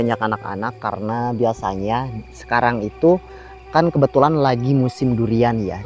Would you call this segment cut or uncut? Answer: uncut